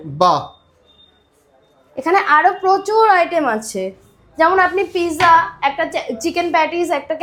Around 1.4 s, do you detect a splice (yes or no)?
no